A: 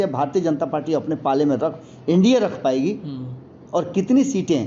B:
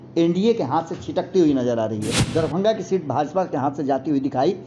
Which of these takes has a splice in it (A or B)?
B